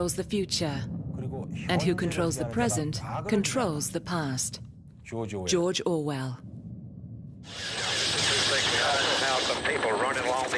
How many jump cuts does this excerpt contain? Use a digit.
1